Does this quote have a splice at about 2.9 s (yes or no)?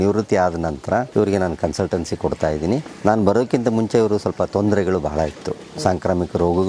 yes